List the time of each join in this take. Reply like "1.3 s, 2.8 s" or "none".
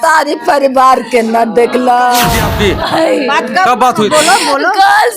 2.5 s